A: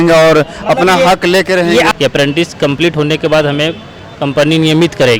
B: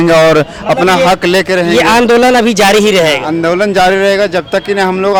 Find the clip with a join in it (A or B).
A